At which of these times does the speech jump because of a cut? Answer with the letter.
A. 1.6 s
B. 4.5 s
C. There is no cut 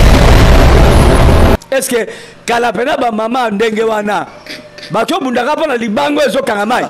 A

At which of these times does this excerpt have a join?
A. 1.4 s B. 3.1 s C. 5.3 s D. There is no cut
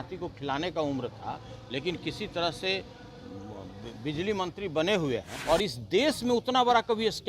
C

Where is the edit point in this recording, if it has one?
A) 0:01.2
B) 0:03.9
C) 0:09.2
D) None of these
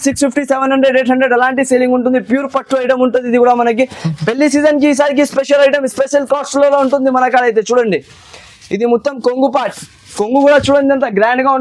D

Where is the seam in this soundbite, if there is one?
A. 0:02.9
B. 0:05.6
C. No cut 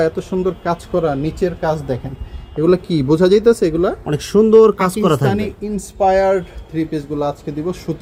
C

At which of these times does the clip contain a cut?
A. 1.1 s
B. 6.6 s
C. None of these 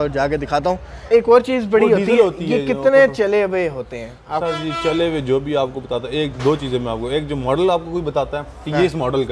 A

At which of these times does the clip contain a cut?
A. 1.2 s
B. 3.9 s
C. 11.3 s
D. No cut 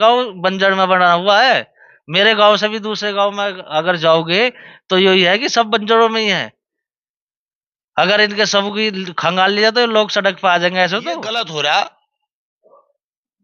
C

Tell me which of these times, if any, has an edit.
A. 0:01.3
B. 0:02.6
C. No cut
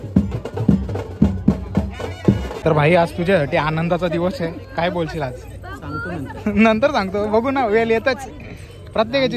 B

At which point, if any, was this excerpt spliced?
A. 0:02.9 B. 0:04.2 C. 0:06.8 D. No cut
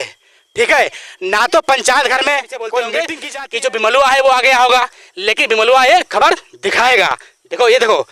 A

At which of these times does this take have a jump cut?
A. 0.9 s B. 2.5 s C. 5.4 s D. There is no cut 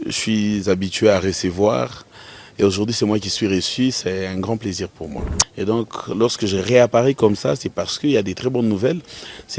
C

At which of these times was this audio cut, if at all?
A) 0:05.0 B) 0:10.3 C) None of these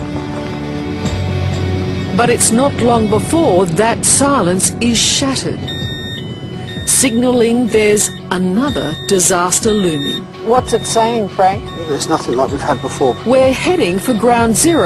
C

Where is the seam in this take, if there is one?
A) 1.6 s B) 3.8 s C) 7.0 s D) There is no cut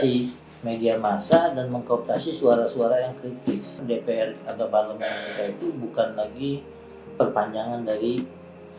B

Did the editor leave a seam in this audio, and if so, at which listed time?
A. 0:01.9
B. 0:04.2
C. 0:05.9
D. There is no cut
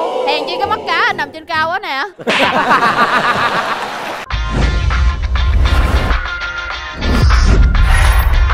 B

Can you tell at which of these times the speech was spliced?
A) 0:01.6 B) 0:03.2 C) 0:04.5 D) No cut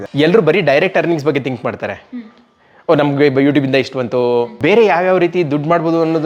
C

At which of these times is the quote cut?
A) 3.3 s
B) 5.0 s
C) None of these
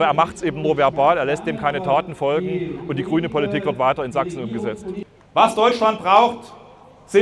B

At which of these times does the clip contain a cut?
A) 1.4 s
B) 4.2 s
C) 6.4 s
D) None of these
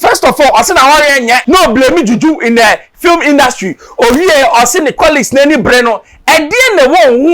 A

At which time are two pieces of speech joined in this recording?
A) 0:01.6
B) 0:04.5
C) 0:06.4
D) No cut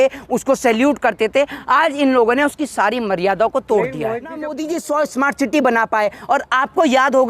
B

